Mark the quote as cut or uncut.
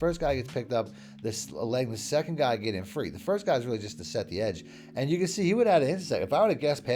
uncut